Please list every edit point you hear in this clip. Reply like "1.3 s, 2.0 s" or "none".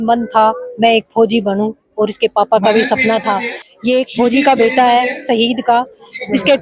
3.6 s